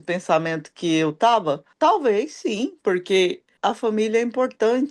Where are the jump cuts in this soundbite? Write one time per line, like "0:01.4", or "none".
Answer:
0:01.7
0:03.5